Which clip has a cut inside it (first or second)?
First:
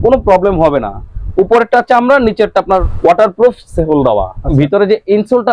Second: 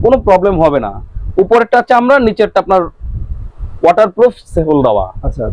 first